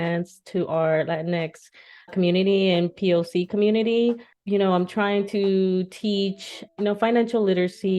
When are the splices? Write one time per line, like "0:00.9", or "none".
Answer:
0:04.3